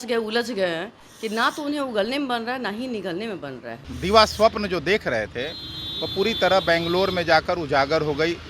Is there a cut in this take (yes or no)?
yes